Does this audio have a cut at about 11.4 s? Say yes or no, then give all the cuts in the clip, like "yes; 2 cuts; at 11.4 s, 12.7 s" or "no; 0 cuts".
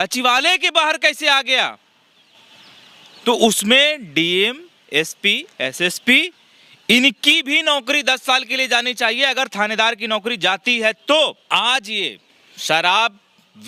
no; 0 cuts